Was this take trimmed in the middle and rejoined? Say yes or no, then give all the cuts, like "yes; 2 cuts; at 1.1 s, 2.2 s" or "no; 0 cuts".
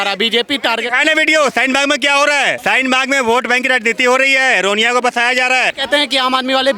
yes; 2 cuts; at 2.6 s, 5.8 s